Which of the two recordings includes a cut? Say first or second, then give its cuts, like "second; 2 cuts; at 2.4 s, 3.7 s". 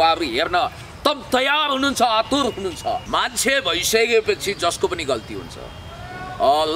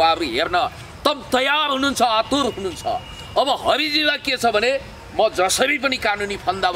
first; 1 cut; at 3.0 s